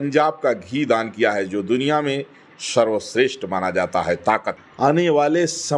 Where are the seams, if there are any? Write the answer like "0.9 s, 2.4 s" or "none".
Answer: 4.6 s